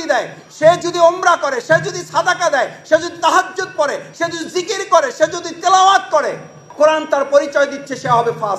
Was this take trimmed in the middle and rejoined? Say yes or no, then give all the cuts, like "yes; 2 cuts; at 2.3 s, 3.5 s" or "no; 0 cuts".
no; 0 cuts